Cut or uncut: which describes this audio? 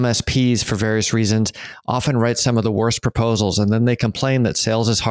uncut